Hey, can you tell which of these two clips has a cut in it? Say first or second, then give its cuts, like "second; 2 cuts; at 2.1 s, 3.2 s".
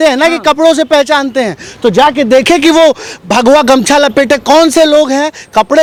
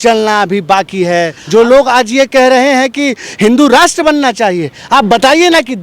second; 1 cut; at 1.4 s